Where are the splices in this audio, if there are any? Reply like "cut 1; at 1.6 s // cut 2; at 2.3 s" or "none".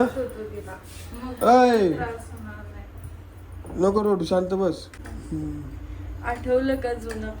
cut 1; at 5.0 s

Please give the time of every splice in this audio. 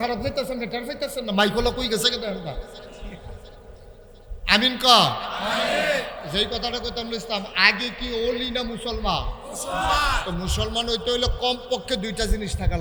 none

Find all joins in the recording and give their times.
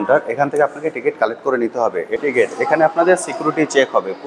cut 1; at 2.2 s

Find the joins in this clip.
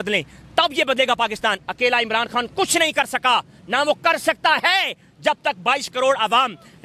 none

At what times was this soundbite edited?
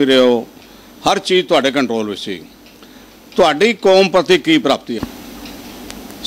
cut 1; at 5.0 s

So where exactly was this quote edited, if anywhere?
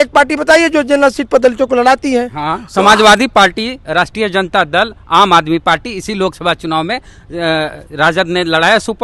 none

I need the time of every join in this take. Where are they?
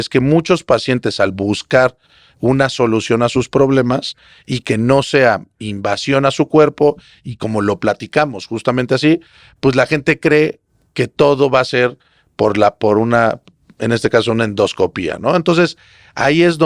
none

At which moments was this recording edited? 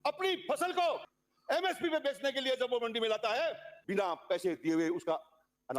cut 1; at 3.7 s

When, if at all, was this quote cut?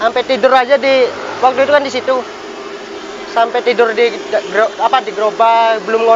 none

